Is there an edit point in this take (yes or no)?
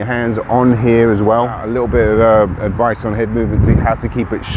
yes